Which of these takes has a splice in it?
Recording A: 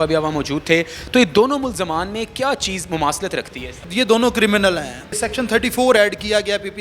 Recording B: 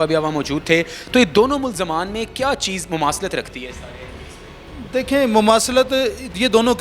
A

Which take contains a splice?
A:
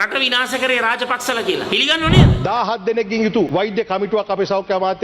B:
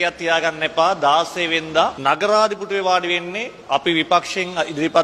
A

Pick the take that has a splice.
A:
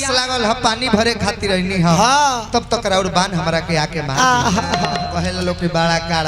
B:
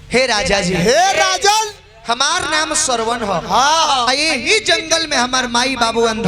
A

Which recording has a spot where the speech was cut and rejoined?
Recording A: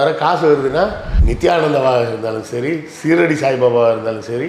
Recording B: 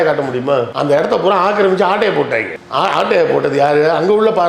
A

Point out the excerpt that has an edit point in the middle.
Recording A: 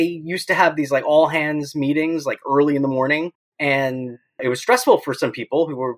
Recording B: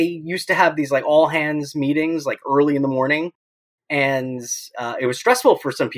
A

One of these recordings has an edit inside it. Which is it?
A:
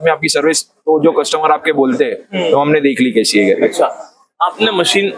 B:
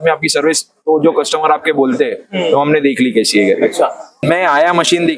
B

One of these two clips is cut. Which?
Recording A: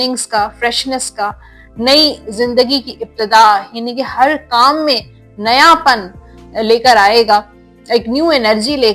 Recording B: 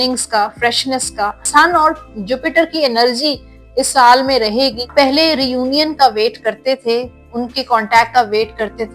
B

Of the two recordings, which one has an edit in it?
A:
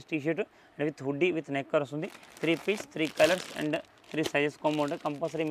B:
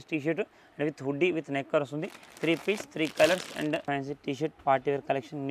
B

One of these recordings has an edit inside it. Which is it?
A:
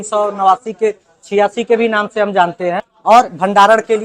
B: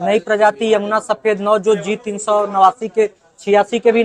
A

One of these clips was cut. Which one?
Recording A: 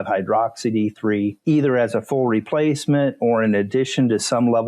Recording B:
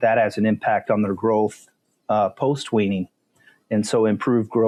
A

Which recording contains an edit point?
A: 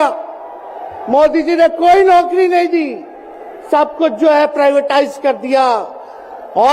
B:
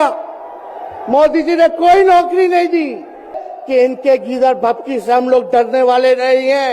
B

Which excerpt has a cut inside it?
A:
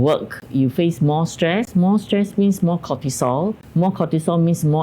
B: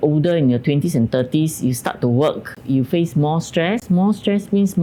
A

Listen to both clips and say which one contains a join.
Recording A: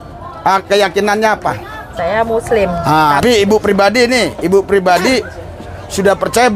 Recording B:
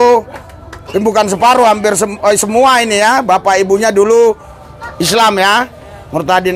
A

